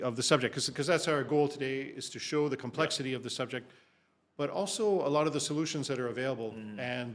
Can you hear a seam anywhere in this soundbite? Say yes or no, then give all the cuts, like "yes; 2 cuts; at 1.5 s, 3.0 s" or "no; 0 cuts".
no; 0 cuts